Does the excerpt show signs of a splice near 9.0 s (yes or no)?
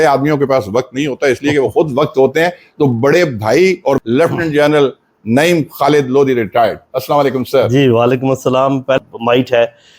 yes